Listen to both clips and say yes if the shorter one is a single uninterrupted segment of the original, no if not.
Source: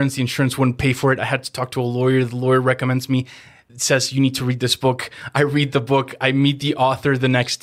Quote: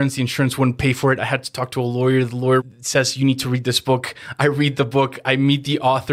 no